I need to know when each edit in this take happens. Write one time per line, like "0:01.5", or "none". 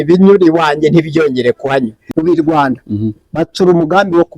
0:02.0